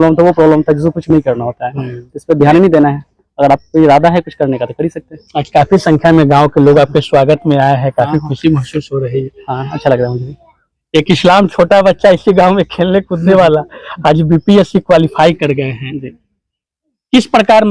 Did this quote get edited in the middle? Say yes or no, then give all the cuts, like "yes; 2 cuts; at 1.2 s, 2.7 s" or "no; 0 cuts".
no; 0 cuts